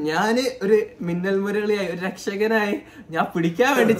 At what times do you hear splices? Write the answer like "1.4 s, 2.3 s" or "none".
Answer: none